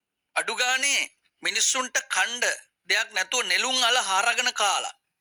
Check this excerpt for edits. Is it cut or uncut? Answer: uncut